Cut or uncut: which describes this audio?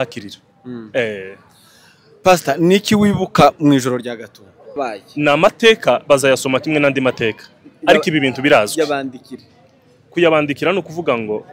cut